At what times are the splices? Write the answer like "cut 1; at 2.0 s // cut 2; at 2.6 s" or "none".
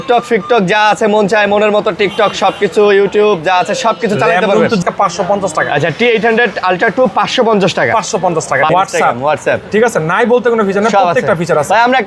cut 1; at 4.8 s // cut 2; at 8.7 s